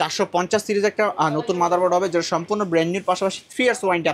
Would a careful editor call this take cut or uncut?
uncut